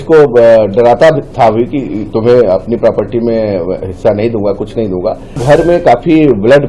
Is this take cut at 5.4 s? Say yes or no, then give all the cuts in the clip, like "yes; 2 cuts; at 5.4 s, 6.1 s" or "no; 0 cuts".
yes; 1 cut; at 5.4 s